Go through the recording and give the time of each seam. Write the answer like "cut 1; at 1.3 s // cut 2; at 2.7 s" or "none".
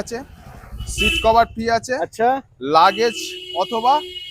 none